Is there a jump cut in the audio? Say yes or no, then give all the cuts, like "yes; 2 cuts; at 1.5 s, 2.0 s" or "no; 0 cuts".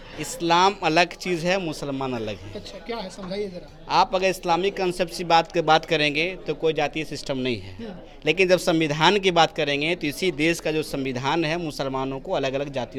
no; 0 cuts